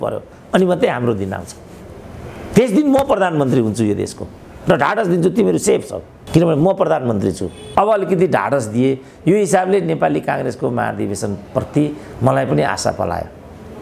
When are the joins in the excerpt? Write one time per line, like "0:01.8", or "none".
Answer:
0:07.5